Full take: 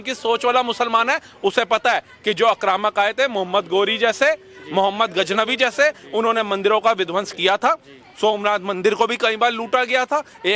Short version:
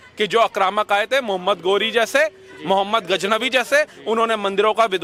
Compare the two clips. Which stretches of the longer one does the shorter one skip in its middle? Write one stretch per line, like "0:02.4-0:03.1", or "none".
none